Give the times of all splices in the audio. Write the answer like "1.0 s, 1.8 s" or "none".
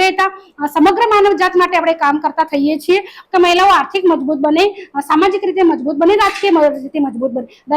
3.2 s